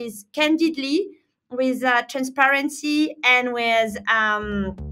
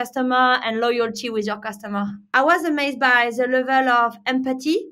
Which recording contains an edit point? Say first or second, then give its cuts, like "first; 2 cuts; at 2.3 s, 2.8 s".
second; 1 cut; at 2.3 s